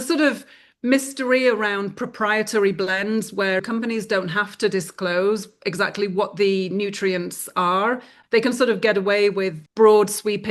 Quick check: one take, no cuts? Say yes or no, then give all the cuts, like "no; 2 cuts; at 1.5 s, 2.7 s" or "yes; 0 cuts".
no; 1 cut; at 8.1 s